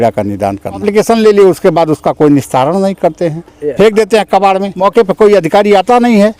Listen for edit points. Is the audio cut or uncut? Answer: cut